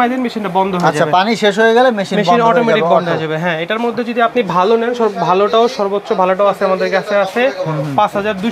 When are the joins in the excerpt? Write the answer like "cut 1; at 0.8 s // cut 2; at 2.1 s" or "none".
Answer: none